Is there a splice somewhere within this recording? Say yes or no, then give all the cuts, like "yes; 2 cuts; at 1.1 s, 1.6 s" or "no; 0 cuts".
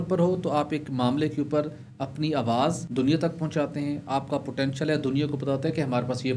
yes; 1 cut; at 2.8 s